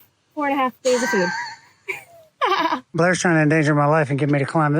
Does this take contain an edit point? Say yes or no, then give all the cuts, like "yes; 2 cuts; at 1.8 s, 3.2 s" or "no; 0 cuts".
yes; 1 cut; at 2.9 s